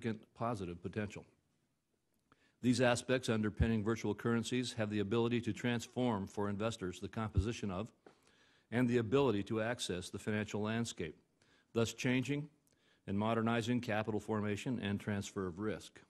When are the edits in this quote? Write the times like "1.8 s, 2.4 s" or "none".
none